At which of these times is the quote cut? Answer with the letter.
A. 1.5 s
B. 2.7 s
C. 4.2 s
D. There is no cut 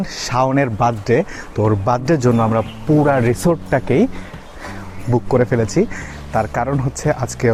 D